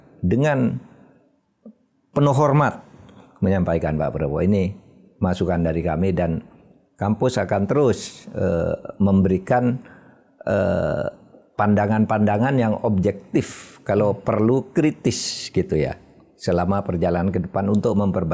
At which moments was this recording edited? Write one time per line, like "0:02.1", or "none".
none